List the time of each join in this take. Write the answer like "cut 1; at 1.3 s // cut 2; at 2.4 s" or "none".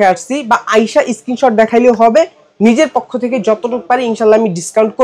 none